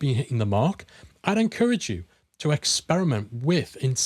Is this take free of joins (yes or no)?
yes